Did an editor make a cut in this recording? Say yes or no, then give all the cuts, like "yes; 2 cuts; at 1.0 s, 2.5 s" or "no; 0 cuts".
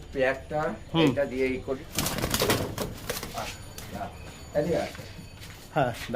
yes; 1 cut; at 1.8 s